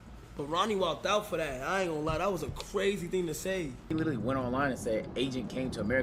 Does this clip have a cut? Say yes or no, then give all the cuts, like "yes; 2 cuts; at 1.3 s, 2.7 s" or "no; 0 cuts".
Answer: yes; 1 cut; at 3.9 s